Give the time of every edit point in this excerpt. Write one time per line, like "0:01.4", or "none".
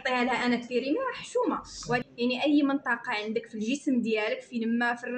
0:02.1